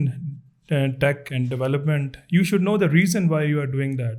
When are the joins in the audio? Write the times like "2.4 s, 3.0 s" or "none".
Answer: none